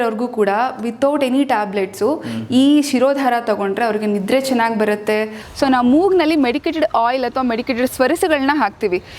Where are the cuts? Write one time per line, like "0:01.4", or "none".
0:05.4